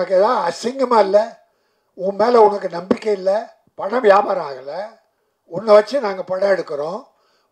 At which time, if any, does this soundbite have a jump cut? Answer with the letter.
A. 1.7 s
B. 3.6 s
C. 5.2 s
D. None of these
B